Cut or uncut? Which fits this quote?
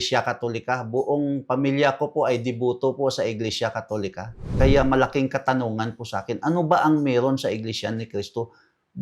cut